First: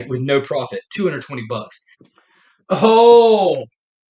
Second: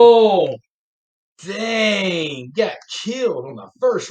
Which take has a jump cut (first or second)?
first